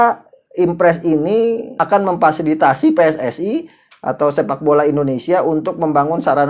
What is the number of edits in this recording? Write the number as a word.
one